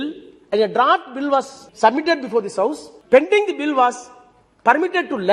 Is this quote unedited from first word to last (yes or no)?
no